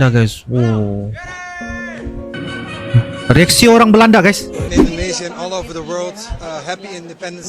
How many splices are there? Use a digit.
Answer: 1